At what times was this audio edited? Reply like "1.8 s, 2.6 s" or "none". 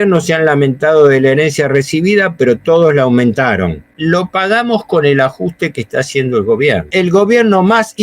3.9 s, 6.9 s